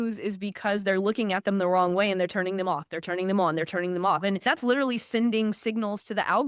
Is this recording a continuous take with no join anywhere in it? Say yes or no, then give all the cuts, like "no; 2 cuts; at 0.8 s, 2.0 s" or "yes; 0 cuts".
no; 1 cut; at 4.5 s